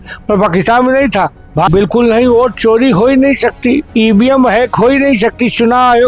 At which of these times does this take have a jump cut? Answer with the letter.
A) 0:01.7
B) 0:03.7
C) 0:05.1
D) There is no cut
A